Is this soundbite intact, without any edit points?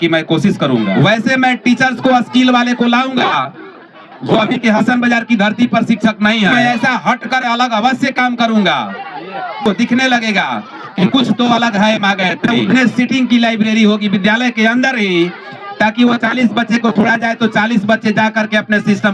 no; 4 cuts; at 0.9 s, 6.5 s, 9.6 s, 12.6 s

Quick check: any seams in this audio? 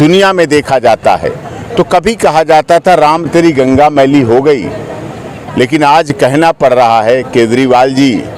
no; 0 cuts

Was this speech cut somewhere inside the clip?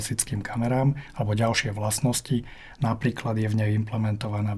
no; 0 cuts

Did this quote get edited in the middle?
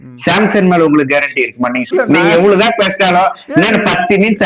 yes; 1 cut; at 1.8 s

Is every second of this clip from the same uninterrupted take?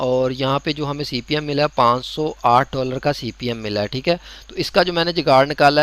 no; 1 cut; at 4.4 s

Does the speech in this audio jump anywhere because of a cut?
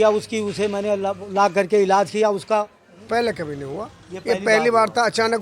yes; 1 cut; at 2.9 s

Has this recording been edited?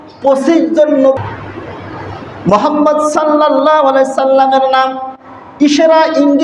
yes; 1 cut; at 1.1 s

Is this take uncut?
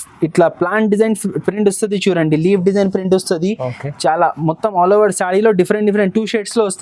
yes; 0 cuts

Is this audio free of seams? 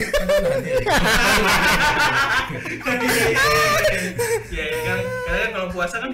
yes; 0 cuts

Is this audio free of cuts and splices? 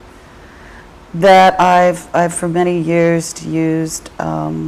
no; 1 cut; at 1.2 s

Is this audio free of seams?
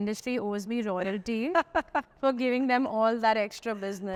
yes; 0 cuts

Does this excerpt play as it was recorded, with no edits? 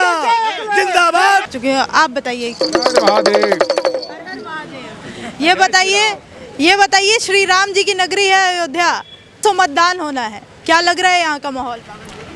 no; 2 cuts; at 1.5 s, 9.4 s

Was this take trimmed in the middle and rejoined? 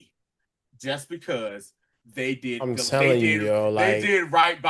no; 0 cuts

